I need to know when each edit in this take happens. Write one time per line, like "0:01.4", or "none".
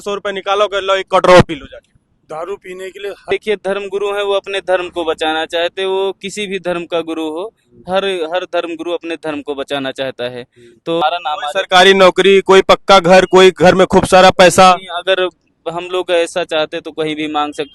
0:03.3
0:11.0